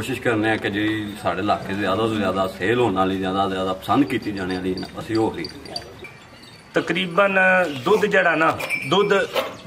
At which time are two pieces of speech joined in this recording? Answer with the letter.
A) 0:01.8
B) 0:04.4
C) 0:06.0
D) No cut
C